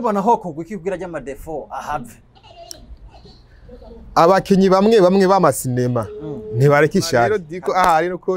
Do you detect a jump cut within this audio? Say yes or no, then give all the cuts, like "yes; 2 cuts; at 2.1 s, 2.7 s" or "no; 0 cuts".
yes; 1 cut; at 7.5 s